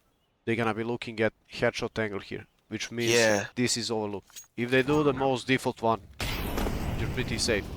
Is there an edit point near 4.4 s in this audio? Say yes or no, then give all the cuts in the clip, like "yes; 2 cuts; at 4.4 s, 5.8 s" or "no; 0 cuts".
yes; 1 cut; at 4.4 s